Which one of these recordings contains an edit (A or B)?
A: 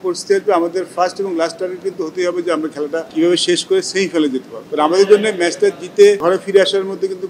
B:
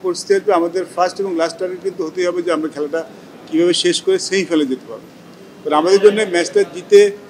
A